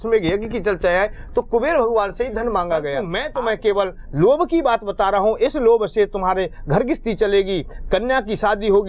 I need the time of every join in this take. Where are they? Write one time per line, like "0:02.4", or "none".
0:03.1